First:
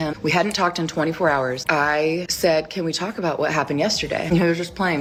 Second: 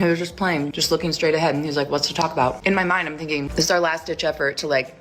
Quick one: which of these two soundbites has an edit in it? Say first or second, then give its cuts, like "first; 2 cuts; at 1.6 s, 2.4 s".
second; 1 cut; at 1.7 s